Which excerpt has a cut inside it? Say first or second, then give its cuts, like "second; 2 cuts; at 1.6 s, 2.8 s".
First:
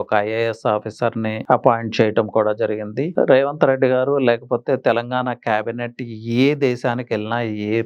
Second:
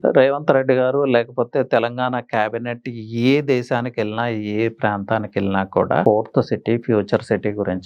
second; 1 cut; at 6.0 s